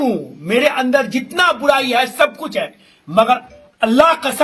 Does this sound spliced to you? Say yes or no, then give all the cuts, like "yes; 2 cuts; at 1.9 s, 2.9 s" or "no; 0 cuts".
no; 0 cuts